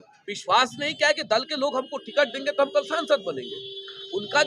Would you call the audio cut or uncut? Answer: uncut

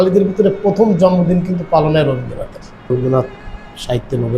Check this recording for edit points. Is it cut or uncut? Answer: cut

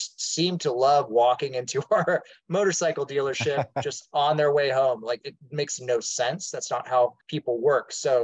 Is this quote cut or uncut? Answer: cut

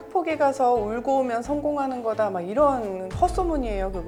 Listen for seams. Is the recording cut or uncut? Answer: uncut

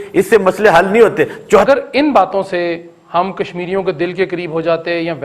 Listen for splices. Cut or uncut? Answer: cut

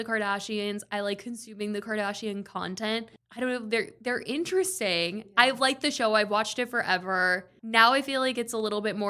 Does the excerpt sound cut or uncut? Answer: cut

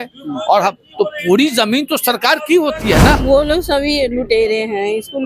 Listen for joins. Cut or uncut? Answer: cut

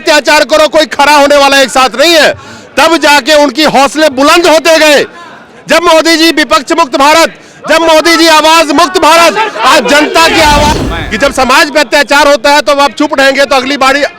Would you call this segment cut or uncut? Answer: cut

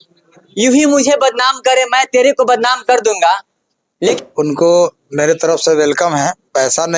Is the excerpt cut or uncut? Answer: cut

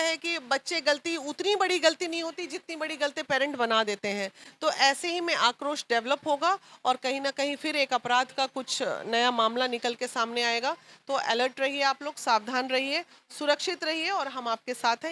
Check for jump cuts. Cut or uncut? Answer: uncut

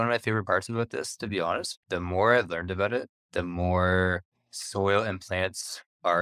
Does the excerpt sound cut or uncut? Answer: cut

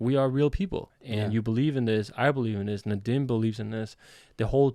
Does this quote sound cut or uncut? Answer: cut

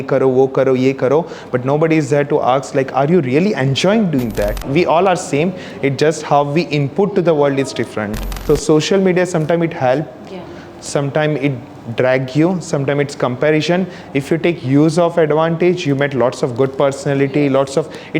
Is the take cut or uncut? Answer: cut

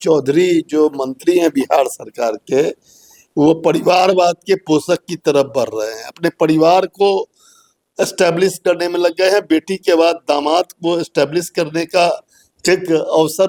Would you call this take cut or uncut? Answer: uncut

